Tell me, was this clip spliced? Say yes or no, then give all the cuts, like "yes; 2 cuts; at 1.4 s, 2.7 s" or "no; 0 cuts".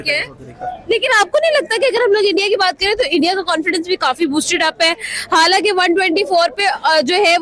no; 0 cuts